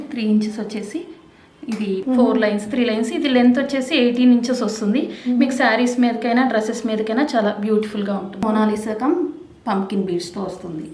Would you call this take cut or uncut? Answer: cut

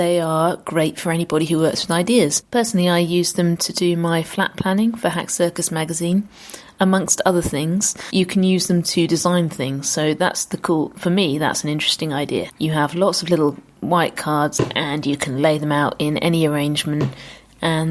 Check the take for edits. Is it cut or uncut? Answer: cut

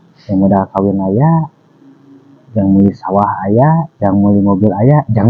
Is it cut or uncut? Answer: uncut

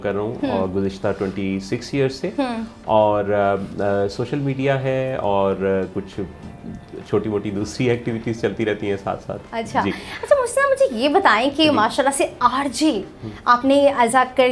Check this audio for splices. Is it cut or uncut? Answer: uncut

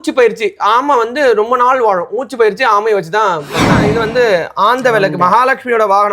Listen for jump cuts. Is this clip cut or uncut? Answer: cut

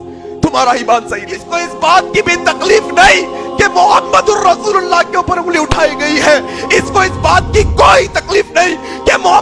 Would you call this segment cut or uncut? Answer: cut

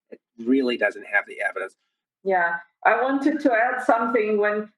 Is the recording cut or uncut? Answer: cut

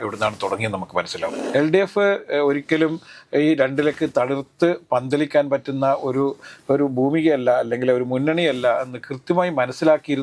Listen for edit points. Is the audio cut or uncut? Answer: cut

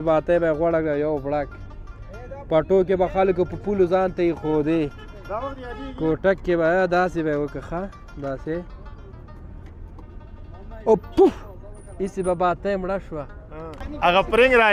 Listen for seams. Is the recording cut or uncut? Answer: cut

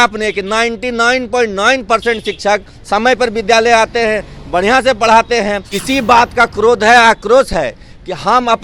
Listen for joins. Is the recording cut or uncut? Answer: cut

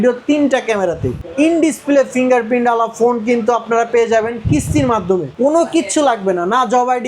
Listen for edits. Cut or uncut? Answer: cut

